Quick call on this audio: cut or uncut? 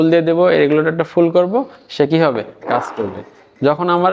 uncut